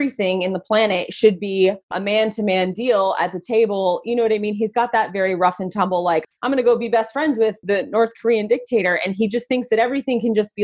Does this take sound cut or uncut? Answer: cut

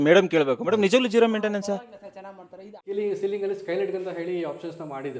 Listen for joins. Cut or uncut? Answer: cut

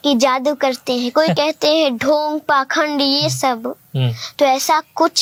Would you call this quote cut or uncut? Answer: uncut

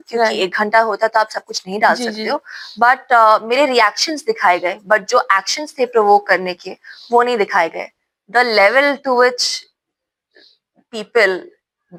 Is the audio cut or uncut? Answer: uncut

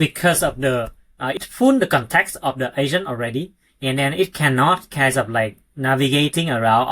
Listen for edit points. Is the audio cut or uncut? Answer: cut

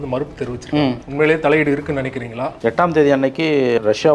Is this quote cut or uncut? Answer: cut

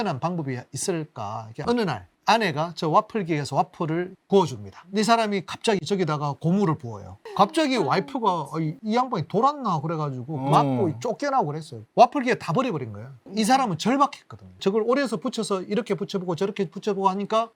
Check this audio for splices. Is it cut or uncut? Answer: uncut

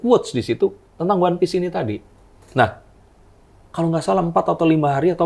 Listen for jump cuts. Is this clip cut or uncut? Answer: uncut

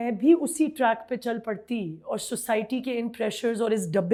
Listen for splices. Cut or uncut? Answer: uncut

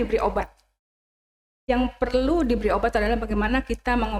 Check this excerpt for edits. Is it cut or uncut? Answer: uncut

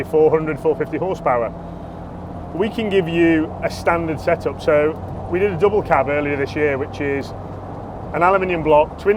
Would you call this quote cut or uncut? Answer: uncut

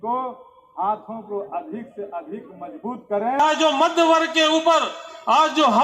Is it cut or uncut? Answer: cut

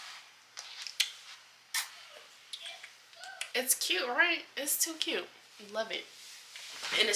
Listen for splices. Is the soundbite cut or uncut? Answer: cut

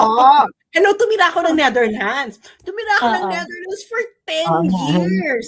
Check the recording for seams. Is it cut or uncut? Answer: uncut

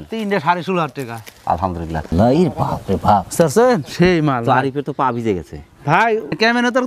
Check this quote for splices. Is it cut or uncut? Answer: cut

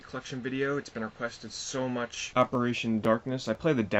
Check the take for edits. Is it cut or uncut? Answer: cut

